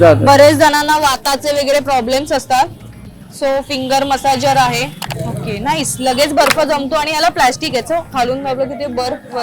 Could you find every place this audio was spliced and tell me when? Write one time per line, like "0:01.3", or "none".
0:05.0
0:08.1